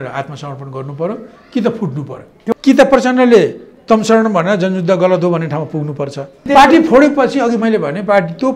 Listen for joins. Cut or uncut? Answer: cut